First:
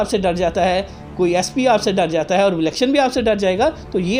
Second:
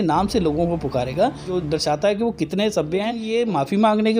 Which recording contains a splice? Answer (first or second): second